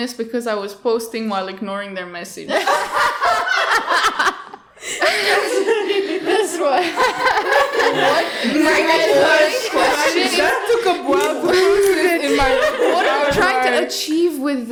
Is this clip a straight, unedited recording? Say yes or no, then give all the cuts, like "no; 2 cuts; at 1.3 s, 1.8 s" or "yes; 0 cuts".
yes; 0 cuts